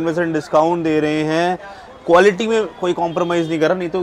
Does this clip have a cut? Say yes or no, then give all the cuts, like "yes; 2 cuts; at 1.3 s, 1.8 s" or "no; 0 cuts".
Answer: no; 0 cuts